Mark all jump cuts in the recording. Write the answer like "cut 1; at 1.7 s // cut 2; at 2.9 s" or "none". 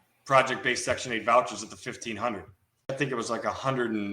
cut 1; at 2.9 s